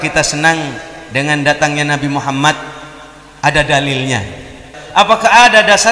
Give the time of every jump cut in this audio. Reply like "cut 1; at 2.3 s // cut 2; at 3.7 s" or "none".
cut 1; at 4.8 s